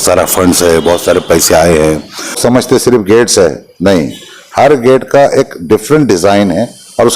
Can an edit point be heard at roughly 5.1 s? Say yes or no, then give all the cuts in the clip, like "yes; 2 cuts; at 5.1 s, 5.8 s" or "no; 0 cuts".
no; 1 cut; at 2.4 s